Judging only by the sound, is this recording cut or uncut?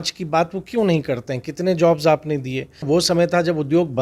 cut